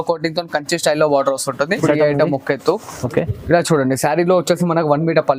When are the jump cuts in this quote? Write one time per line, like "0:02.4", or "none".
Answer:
0:01.8